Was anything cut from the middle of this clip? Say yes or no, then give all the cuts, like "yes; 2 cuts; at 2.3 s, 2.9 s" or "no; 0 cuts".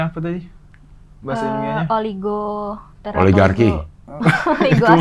no; 0 cuts